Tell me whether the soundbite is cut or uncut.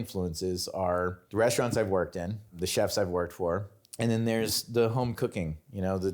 cut